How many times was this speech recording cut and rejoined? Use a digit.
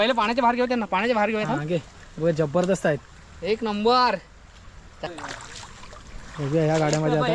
1